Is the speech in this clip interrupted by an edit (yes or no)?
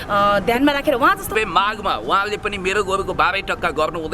yes